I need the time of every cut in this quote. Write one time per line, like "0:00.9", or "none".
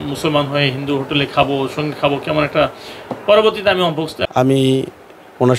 0:04.2